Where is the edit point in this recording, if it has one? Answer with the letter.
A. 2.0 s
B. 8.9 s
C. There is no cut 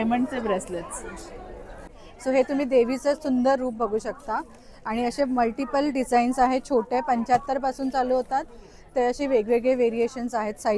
A